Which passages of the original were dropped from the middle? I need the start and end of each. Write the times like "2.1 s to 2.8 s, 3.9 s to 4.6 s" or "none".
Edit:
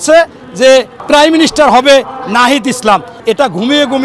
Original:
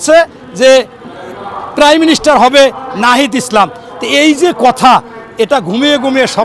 1.0 s to 1.6 s, 3.8 s to 5.2 s